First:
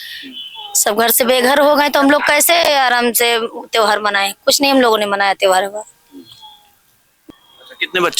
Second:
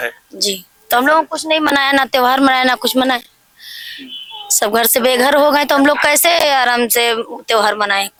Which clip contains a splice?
first; 1 cut; at 7.1 s

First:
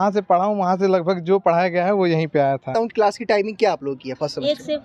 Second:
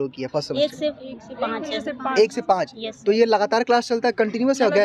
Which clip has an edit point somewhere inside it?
first; 1 cut; at 2.7 s

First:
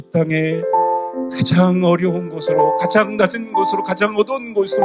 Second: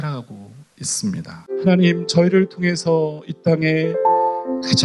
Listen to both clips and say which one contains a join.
second; 1 cut; at 1.5 s

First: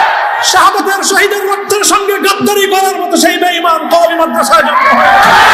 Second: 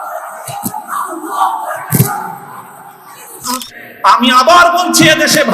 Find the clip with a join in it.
second; 1 cut; at 3.6 s

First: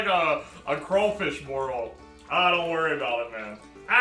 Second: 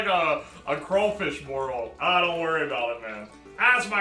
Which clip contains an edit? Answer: second; 1 cut; at 1.9 s

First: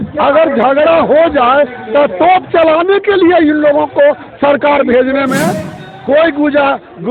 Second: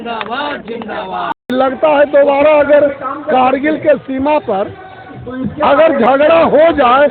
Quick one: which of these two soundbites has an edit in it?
second; 1 cut; at 1.5 s

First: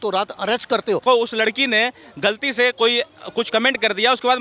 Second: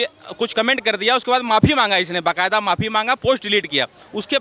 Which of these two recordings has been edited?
first; 1 cut; at 1.0 s

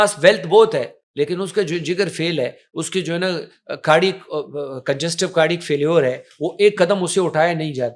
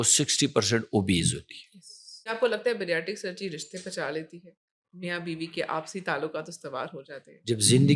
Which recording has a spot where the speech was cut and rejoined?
second; 1 cut; at 2.3 s

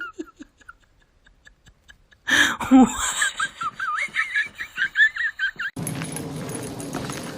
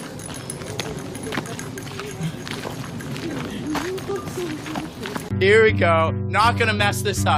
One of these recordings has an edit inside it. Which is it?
first; 1 cut; at 5.7 s

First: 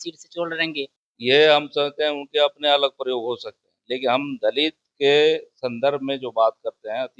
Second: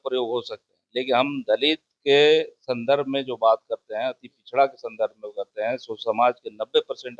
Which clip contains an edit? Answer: first; 1 cut; at 1.0 s

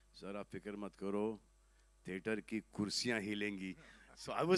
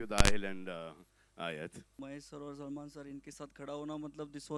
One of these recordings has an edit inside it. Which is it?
second; 1 cut; at 2.0 s

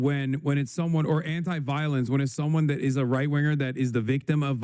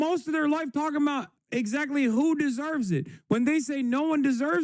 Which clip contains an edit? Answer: second; 1 cut; at 1.3 s

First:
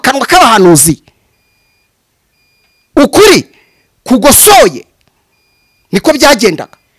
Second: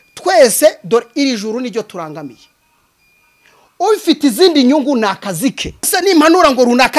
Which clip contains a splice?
second; 1 cut; at 5.9 s

